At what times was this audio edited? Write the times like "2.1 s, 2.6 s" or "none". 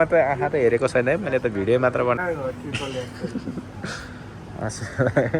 2.2 s